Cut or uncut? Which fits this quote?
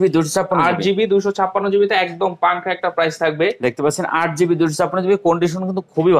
uncut